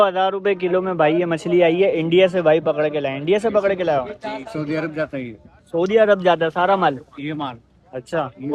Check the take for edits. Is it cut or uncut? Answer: uncut